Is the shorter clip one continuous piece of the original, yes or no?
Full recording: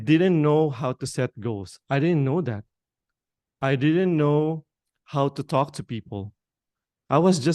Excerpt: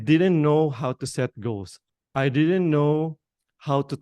no